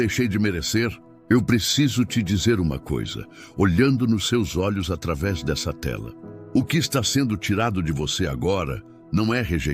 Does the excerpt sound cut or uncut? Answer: cut